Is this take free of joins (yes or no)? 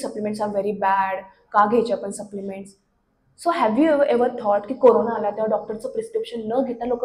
yes